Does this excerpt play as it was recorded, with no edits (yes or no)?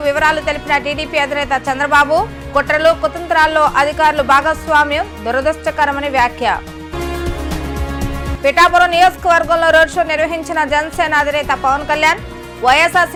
yes